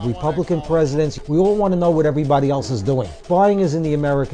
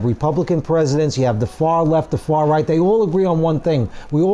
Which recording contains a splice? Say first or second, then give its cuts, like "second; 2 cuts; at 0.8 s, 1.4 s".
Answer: first; 2 cuts; at 1.1 s, 3.2 s